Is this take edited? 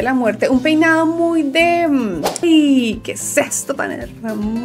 yes; 1 cut; at 2.4 s

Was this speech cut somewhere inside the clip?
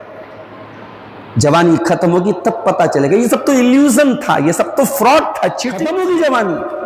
yes; 1 cut; at 5.8 s

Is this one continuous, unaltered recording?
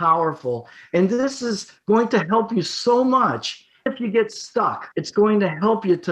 no; 1 cut; at 4.9 s

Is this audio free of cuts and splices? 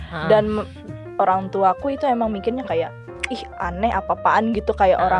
yes; 0 cuts

